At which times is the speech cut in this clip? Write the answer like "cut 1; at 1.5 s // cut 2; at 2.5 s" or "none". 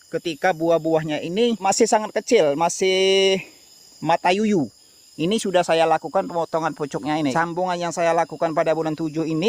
cut 1; at 1.6 s // cut 2; at 7.3 s